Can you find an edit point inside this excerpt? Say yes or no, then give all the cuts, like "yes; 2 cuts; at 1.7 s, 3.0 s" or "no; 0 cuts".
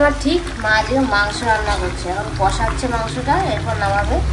no; 0 cuts